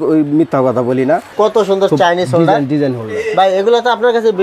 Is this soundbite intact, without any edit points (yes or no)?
no